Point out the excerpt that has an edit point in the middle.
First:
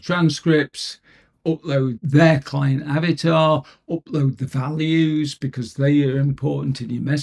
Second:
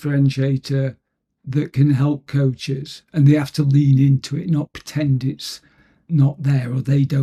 first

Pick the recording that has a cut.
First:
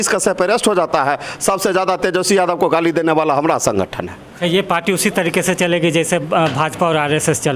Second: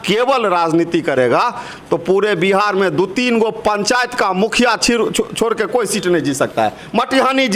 first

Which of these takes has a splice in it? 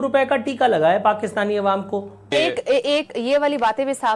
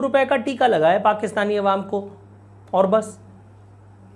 first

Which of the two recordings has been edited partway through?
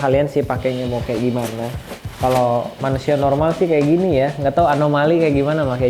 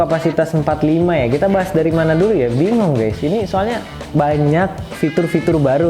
second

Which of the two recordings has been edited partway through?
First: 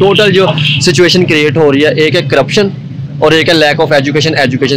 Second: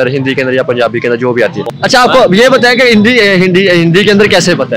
second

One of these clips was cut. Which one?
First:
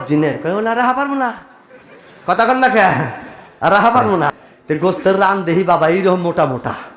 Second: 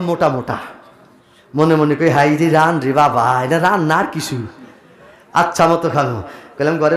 first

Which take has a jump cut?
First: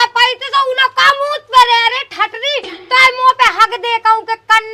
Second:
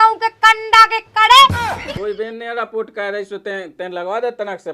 second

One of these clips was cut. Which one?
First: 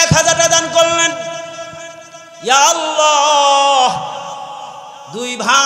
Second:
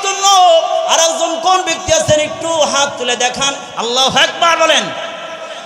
second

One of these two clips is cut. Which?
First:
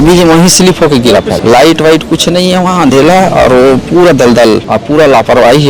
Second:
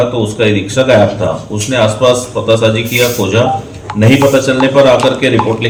first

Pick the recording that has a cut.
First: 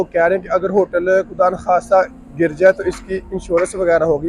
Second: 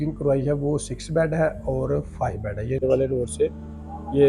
second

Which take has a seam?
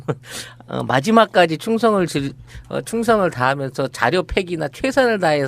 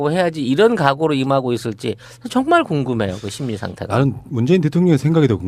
first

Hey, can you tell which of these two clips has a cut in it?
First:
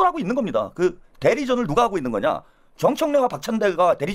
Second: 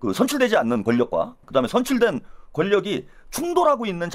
second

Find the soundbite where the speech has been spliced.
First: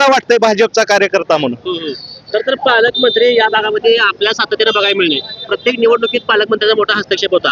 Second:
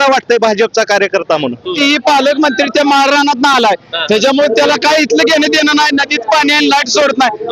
second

